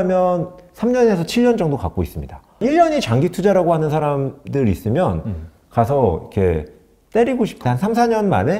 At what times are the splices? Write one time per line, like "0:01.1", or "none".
0:02.6
0:07.6